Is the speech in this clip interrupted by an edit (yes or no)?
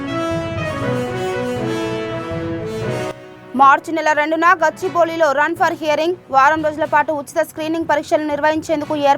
no